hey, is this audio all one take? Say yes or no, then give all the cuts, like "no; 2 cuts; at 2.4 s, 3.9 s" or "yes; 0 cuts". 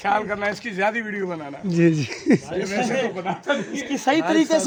yes; 0 cuts